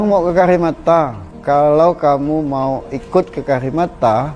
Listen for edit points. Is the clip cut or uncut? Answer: cut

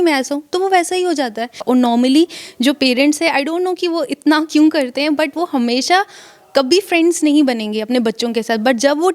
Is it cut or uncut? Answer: cut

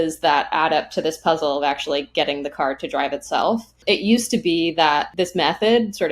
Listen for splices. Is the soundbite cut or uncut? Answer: cut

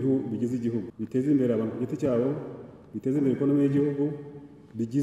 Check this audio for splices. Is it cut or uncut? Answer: cut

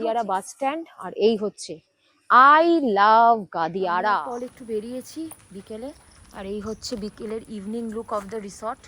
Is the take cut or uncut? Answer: cut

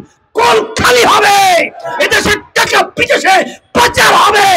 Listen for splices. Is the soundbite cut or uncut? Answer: uncut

